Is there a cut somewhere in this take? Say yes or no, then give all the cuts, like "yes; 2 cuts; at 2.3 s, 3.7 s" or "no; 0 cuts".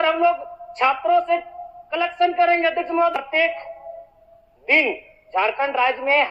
yes; 1 cut; at 3.1 s